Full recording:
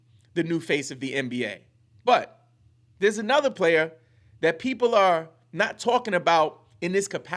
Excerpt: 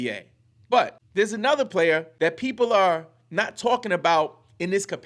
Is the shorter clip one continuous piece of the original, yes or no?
no